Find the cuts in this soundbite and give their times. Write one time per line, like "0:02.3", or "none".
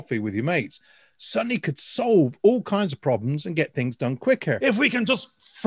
0:04.6